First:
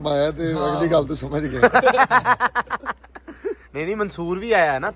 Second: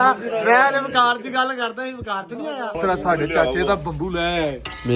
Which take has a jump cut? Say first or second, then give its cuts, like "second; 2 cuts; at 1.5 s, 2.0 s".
second; 1 cut; at 2.8 s